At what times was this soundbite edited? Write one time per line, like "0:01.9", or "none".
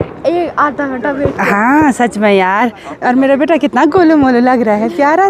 none

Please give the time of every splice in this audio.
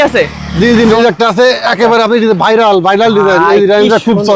0:01.0

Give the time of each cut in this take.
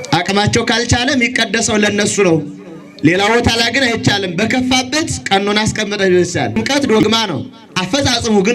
0:06.6

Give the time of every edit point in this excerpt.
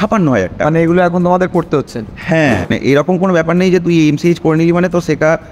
0:02.8

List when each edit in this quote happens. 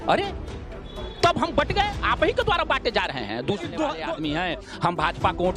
0:04.1

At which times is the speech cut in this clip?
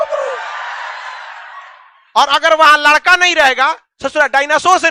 none

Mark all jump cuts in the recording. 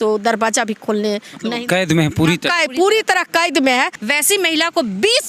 0:04.0

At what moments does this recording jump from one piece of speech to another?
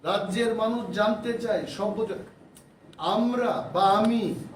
0:01.4

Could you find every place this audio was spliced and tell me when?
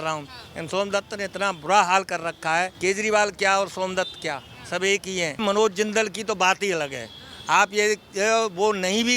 0:02.7
0:05.4

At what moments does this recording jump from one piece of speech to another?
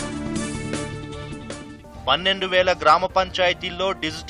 0:01.2

